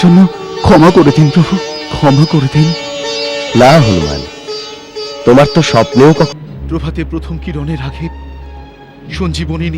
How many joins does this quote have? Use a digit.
1